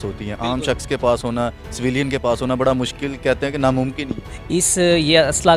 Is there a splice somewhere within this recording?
no; 0 cuts

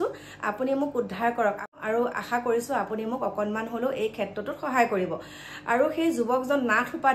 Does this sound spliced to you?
yes; 1 cut; at 1.7 s

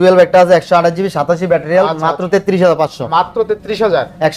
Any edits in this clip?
no; 0 cuts

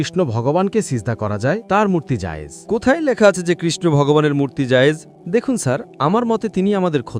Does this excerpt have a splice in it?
yes; 1 cut; at 5.2 s

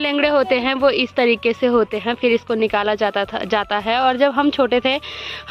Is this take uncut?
yes; 0 cuts

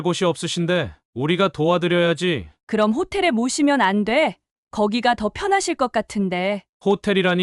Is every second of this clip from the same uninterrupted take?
yes; 0 cuts

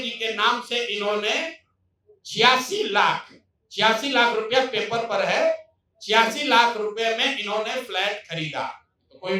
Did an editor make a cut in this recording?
no; 0 cuts

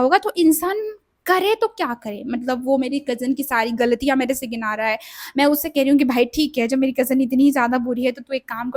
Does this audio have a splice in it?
no; 0 cuts

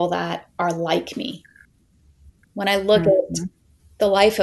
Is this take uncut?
no; 1 cut; at 2.1 s

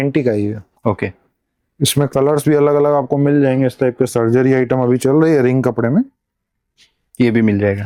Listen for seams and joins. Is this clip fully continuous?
yes; 0 cuts

